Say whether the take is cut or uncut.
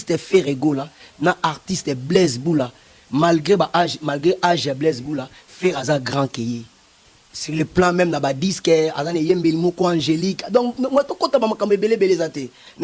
uncut